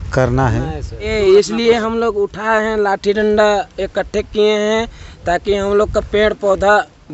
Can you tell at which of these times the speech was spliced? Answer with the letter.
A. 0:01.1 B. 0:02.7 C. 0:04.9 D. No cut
A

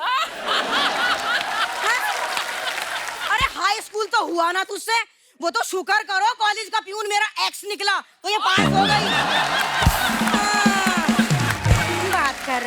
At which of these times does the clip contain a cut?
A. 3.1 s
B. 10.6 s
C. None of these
A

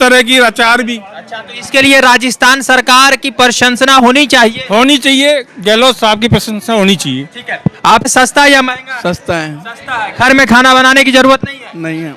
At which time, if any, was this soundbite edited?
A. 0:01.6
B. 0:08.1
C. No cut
B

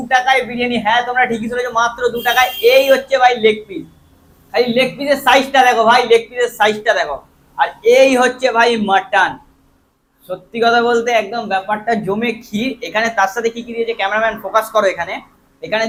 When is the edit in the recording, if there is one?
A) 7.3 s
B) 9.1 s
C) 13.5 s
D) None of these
D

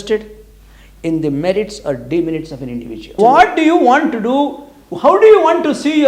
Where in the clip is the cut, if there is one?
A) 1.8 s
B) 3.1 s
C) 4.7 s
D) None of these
B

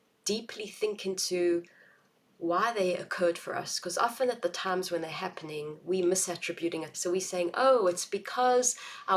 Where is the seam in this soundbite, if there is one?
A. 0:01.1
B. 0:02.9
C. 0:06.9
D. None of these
C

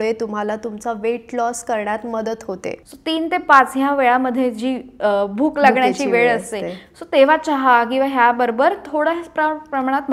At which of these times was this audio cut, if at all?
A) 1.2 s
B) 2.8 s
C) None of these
B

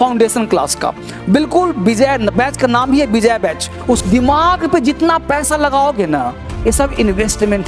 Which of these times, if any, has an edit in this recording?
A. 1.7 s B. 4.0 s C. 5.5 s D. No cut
B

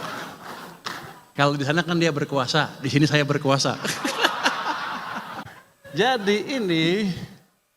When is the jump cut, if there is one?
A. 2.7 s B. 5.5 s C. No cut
B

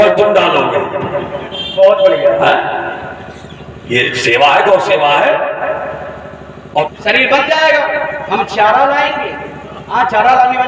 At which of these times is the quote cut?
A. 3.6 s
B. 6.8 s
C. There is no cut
B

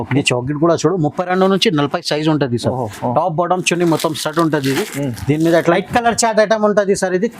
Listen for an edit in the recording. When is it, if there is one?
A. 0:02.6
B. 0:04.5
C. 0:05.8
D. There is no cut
C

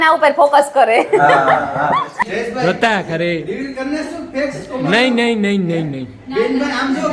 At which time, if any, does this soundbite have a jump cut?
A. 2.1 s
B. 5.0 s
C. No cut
A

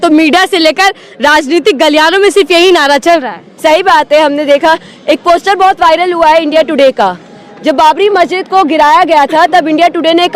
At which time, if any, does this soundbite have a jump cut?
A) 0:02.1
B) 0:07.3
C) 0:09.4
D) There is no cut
D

